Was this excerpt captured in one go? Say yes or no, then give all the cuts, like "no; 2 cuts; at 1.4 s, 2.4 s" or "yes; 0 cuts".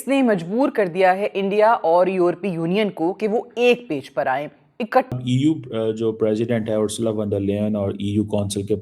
no; 1 cut; at 5.1 s